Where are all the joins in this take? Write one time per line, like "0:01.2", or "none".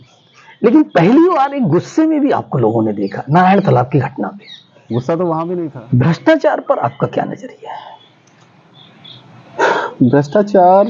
0:05.8